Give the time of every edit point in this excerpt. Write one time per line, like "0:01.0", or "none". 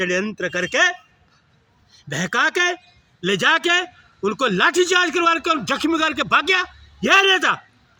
none